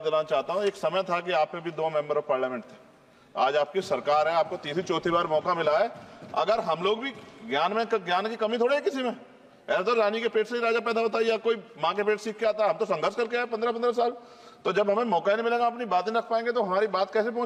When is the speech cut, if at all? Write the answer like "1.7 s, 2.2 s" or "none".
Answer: none